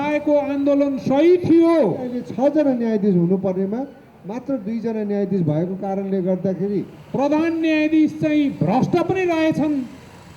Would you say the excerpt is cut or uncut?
cut